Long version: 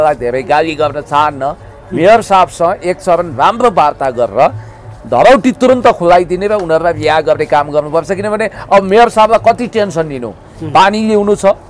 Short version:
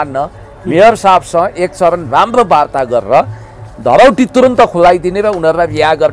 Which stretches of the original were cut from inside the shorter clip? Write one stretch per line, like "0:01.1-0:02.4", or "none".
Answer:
none